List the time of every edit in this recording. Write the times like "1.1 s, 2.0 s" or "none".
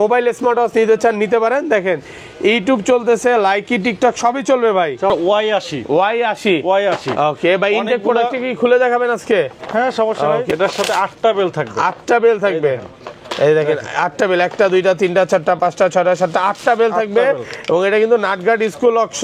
5.1 s, 10.4 s